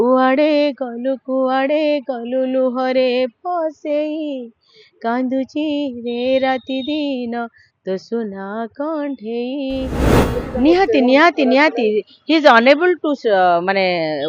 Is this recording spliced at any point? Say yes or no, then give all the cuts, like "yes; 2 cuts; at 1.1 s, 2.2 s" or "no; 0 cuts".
yes; 1 cut; at 10.2 s